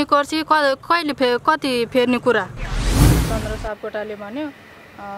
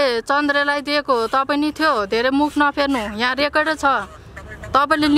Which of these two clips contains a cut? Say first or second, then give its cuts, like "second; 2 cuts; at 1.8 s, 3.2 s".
first; 1 cut; at 3.1 s